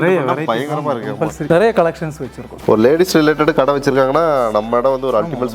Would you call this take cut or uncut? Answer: cut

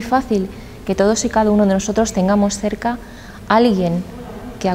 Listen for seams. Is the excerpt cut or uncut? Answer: uncut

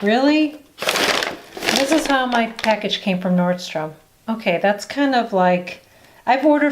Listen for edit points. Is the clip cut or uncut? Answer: cut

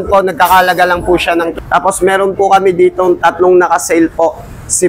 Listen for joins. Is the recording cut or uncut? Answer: cut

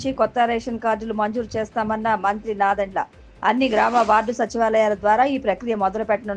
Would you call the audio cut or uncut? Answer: uncut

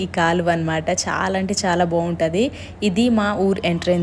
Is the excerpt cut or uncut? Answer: uncut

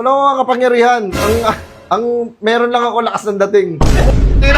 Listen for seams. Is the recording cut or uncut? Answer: uncut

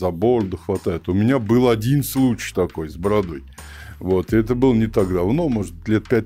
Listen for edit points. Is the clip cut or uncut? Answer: uncut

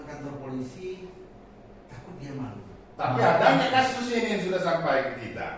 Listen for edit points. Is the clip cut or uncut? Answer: uncut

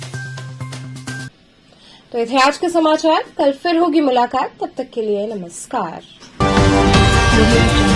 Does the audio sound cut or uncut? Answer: uncut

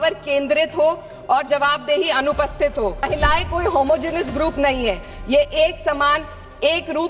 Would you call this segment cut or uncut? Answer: cut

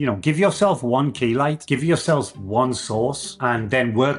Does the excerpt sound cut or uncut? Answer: cut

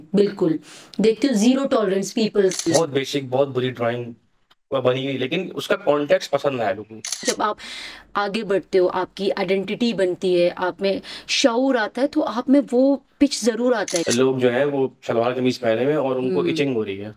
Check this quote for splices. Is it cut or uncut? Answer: cut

